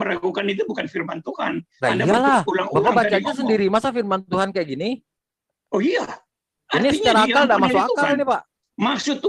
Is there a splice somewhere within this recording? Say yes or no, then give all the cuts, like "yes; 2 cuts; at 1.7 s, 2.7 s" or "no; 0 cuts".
no; 0 cuts